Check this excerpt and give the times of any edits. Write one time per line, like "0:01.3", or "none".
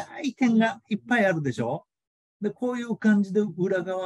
none